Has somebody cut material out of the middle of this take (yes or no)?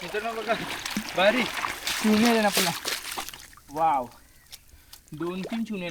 no